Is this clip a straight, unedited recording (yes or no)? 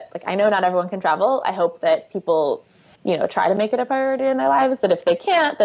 no